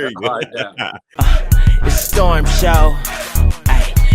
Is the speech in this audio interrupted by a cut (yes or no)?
yes